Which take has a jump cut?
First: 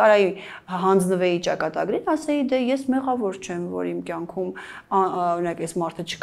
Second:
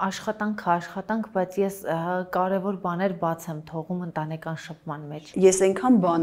second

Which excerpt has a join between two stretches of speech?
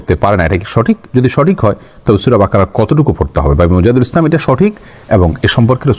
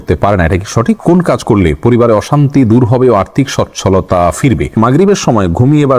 second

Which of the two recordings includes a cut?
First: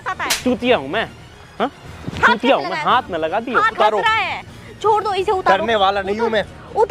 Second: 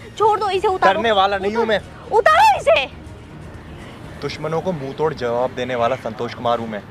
first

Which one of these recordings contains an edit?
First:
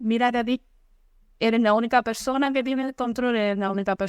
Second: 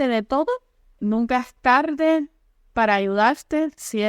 second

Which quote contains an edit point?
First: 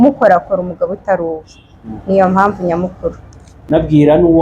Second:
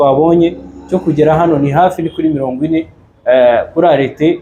first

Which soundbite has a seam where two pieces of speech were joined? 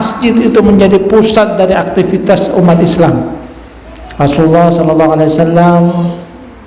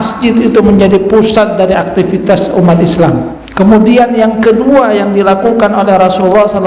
second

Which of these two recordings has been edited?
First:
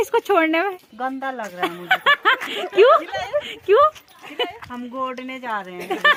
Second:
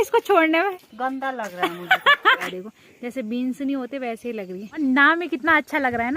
second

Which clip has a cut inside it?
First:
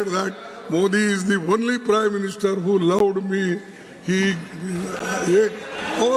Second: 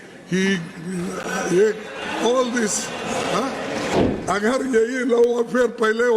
second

